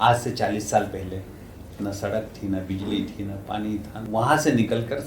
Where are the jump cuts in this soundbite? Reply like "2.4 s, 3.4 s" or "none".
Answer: 4.0 s